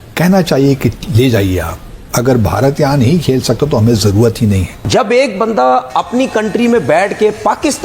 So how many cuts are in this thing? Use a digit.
1